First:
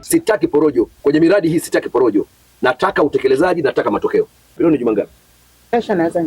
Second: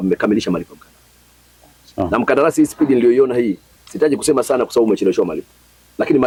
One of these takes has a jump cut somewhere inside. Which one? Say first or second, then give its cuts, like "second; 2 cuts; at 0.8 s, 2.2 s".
first; 2 cuts; at 0.9 s, 4.6 s